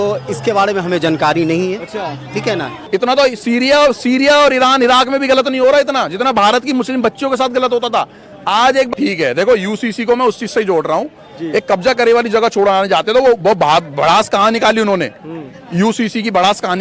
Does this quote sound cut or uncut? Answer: cut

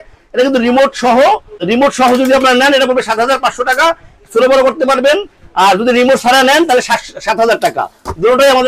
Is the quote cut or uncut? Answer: uncut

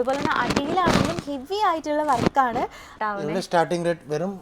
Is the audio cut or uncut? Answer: cut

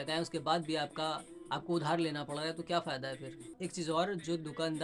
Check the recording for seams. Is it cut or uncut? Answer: uncut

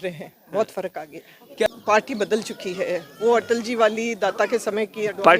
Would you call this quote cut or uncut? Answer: cut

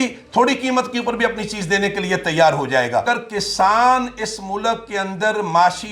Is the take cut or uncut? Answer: cut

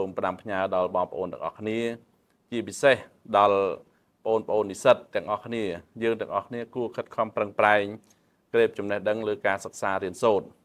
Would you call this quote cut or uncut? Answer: uncut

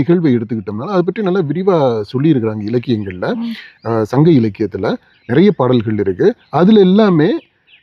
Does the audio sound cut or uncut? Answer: uncut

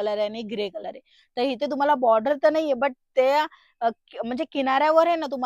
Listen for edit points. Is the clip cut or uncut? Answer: uncut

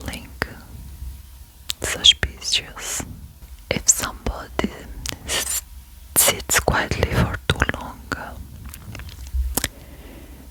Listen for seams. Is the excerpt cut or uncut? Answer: uncut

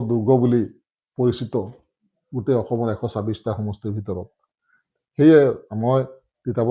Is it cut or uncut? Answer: uncut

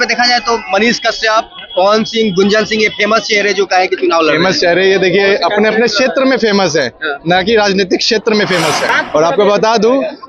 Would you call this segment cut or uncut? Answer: cut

